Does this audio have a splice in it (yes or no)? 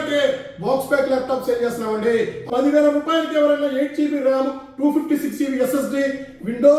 yes